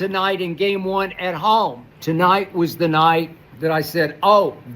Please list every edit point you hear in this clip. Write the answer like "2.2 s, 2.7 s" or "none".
1.9 s, 3.4 s